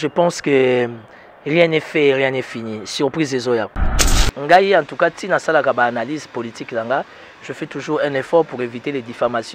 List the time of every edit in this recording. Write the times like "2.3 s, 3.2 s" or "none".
3.8 s